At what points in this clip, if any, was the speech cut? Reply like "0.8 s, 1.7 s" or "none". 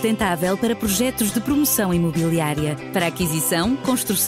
none